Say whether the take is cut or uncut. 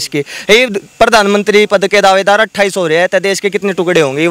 uncut